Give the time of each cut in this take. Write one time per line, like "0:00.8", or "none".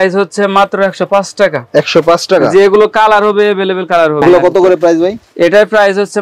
0:04.2